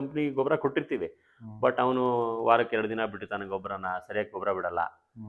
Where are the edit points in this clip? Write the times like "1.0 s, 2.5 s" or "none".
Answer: none